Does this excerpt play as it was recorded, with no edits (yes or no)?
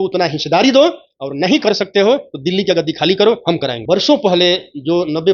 no